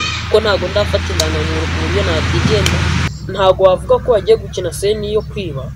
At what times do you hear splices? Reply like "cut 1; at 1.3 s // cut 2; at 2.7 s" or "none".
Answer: cut 1; at 3.1 s